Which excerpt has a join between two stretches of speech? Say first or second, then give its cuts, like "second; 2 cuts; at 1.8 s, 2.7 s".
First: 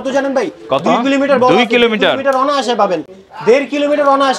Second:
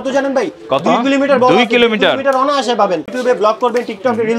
second; 1 cut; at 3.1 s